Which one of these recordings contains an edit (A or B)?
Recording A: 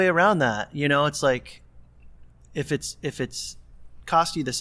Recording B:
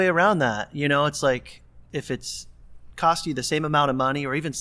B